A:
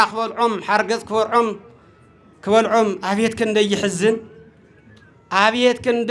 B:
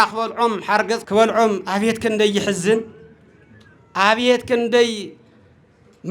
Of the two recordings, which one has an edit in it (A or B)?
B